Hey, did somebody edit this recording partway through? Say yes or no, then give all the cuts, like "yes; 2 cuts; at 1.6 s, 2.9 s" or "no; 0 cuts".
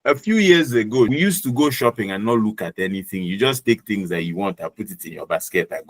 yes; 1 cut; at 1.1 s